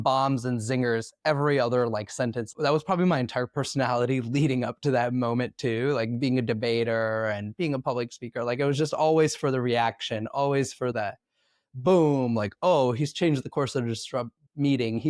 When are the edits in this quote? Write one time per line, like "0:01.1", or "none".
none